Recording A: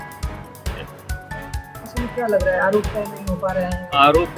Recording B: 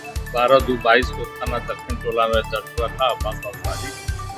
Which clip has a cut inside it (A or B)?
A